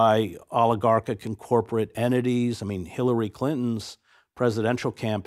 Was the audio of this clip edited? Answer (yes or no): no